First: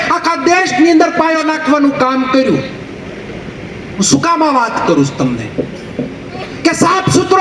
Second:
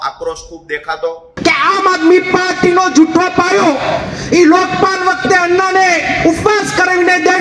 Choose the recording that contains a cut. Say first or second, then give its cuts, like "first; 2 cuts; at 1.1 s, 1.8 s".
second; 1 cut; at 1.3 s